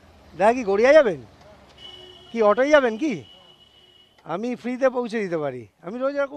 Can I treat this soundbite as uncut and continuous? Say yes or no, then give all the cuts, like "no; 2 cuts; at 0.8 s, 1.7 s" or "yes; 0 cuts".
yes; 0 cuts